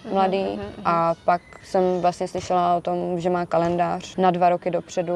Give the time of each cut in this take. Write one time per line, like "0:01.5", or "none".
0:01.5
0:04.0

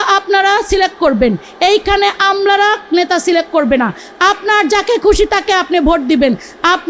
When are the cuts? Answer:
none

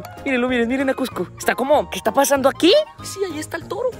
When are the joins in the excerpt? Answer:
0:01.9
0:03.0

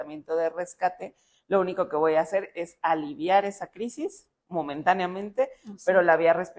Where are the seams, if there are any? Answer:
none

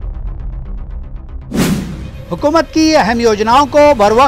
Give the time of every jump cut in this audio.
none

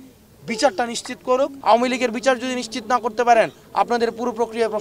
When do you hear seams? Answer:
0:01.6

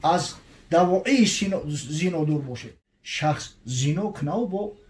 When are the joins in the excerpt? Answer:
0:02.9

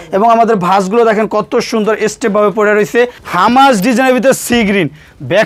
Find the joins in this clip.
0:03.2

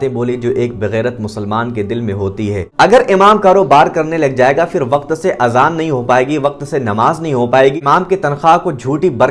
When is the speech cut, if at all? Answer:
0:02.7
0:07.7

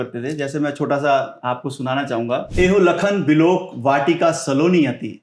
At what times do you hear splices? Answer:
0:02.5

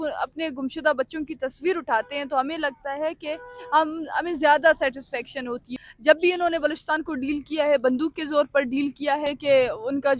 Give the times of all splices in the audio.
0:05.8
0:09.3

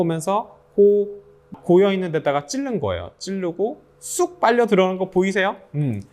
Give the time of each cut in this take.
0:01.5

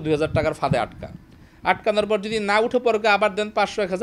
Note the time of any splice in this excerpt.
none

